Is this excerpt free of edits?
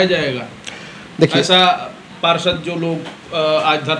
yes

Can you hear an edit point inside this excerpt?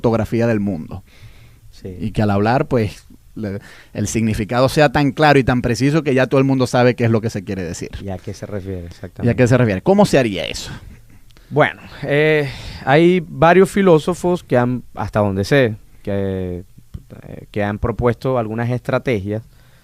no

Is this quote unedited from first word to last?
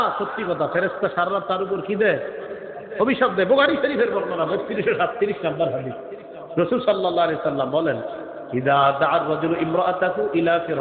yes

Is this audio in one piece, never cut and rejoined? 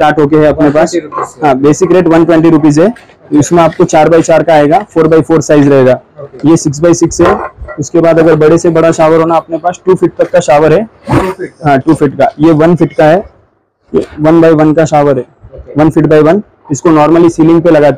yes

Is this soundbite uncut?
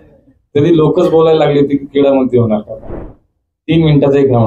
no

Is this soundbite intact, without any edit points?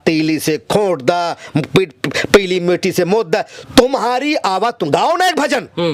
yes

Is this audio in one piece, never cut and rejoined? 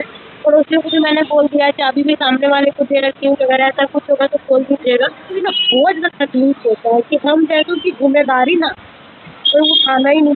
no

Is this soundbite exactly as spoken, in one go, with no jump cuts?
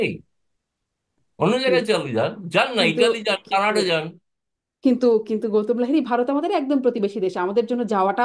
yes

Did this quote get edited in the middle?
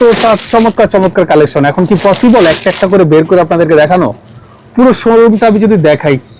no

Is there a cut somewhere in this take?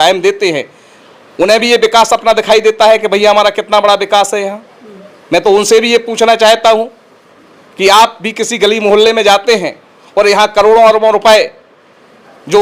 no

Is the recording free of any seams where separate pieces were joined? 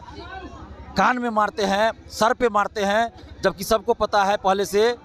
yes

